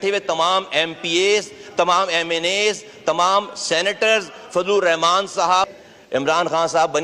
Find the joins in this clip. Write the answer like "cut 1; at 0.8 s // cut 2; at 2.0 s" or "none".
cut 1; at 5.7 s